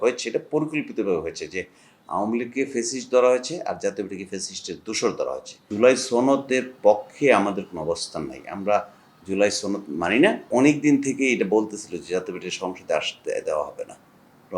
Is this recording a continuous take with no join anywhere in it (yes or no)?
no